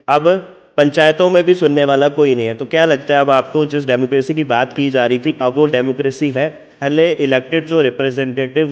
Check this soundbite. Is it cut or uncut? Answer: cut